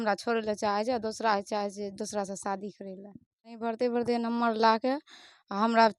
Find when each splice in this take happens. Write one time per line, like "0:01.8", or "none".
0:03.7